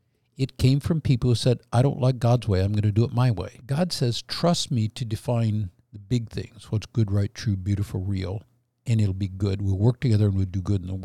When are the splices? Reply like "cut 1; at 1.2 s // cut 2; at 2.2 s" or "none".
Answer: cut 1; at 3.5 s

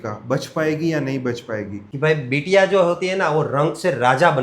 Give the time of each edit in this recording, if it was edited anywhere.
cut 1; at 1.8 s

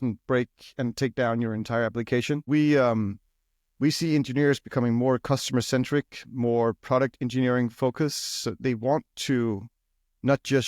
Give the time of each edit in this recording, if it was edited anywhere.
cut 1; at 2.5 s

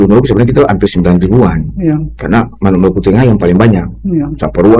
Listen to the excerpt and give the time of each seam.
none

